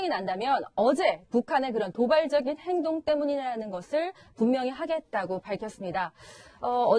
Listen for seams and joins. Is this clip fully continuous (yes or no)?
no